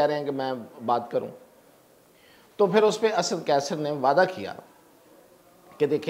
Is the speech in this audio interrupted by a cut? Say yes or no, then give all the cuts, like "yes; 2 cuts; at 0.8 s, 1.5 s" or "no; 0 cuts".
no; 0 cuts